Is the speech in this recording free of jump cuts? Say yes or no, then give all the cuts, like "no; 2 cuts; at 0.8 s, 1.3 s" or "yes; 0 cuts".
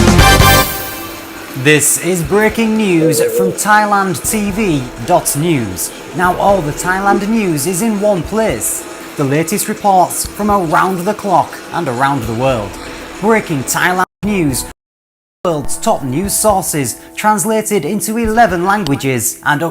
no; 1 cut; at 0.9 s